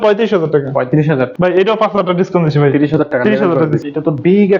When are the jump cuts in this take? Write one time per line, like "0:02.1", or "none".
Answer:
0:01.3
0:03.8